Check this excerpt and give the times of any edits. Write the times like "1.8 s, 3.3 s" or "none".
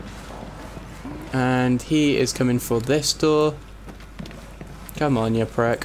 none

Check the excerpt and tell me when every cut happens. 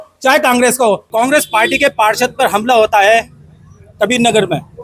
1.1 s

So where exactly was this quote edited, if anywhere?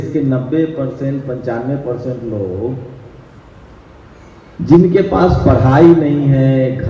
none

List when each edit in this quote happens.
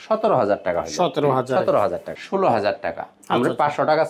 2.1 s

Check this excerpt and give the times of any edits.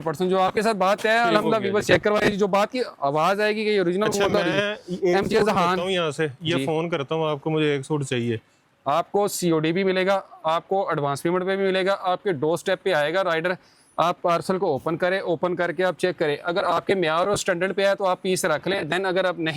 none

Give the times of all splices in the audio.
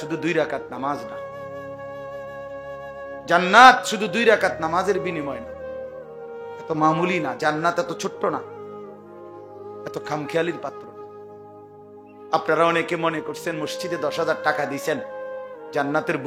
none

